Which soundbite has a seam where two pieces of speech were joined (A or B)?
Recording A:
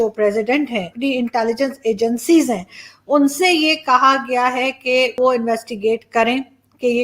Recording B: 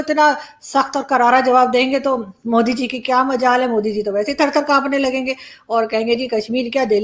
A